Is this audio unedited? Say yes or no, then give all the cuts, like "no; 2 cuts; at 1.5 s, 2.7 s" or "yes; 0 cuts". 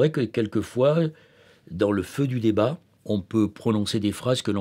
no; 1 cut; at 2.9 s